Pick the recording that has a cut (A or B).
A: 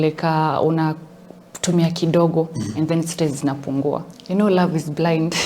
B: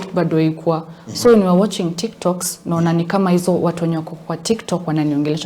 A